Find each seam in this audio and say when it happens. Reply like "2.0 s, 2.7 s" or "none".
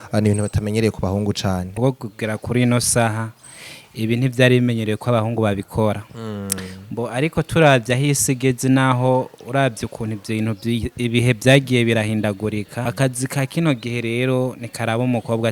1.7 s, 12.9 s